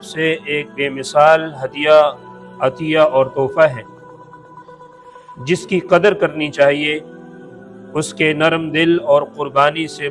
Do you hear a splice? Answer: yes; 2 cuts; at 3.8 s, 5.3 s

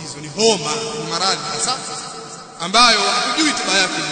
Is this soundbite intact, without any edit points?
yes; 0 cuts

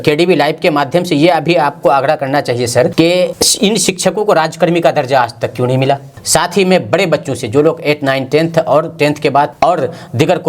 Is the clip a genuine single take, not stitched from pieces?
no; 3 cuts; at 3.1 s, 6.1 s, 9.5 s

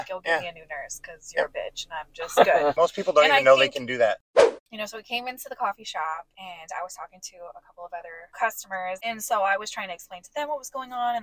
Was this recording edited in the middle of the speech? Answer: yes; 5 cuts; at 2.7 s, 4.4 s, 6.3 s, 8.2 s, 9.0 s

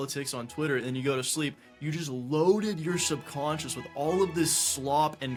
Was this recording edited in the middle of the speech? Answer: no; 0 cuts

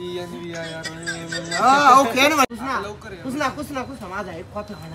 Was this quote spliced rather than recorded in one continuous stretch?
yes; 1 cut; at 2.5 s

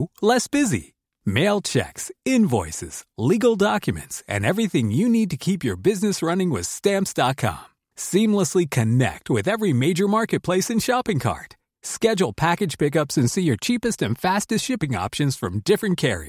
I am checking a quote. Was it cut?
no; 0 cuts

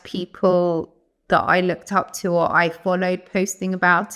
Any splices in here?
no; 0 cuts

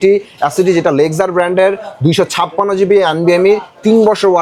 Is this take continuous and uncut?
yes; 0 cuts

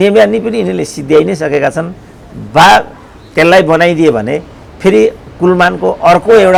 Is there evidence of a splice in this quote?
no; 0 cuts

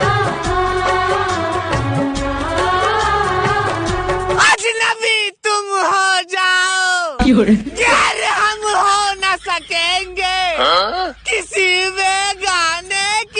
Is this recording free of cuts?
yes; 0 cuts

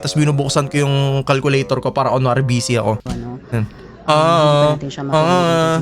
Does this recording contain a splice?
no; 0 cuts

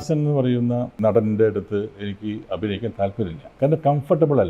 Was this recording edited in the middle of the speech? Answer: yes; 2 cuts; at 0.9 s, 3.5 s

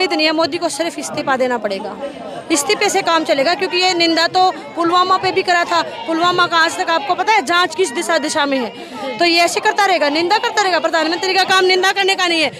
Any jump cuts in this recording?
no; 0 cuts

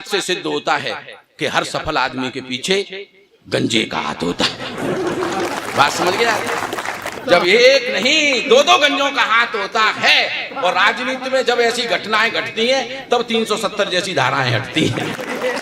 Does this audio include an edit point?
yes; 1 cut; at 7.2 s

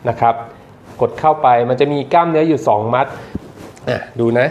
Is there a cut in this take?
yes; 1 cut; at 3.3 s

